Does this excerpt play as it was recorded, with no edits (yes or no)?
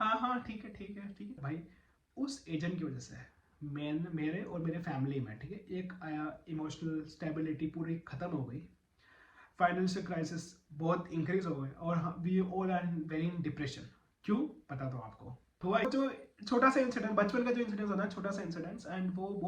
no